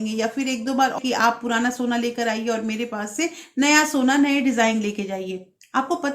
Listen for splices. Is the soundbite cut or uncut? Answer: cut